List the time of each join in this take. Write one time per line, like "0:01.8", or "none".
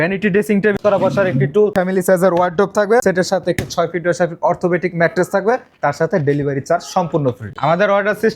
0:00.8
0:01.7
0:03.0
0:07.5